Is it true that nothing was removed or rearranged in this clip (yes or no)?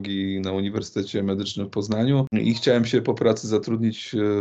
no